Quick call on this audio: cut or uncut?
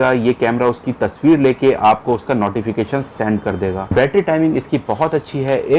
cut